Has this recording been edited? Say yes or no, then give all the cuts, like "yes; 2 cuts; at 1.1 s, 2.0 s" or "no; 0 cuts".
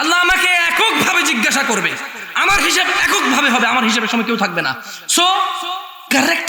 no; 0 cuts